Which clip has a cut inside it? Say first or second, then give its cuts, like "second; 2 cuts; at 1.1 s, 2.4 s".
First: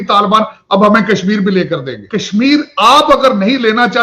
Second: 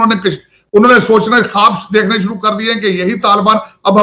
first; 1 cut; at 2.0 s